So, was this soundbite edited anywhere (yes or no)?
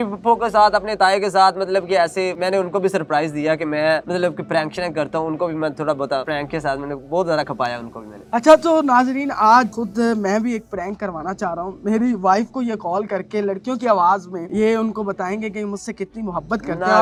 no